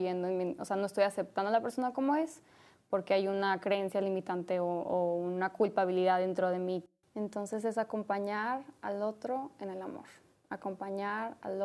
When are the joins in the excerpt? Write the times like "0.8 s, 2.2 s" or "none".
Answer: 6.8 s